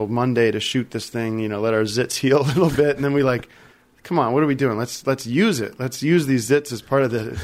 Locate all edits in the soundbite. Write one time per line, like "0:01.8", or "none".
none